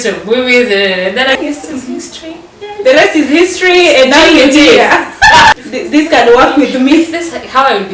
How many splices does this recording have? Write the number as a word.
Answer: two